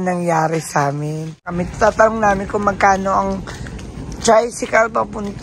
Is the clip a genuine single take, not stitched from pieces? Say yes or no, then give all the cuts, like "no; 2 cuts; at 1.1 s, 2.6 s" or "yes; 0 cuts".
no; 1 cut; at 1.6 s